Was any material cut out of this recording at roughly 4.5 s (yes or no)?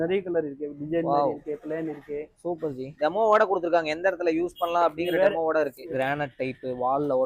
no